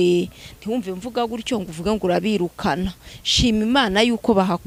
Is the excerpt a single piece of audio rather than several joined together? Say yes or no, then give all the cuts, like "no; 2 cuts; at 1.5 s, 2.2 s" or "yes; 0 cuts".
yes; 0 cuts